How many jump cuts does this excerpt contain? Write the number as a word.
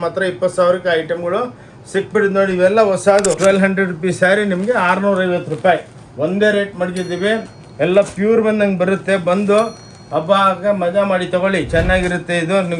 one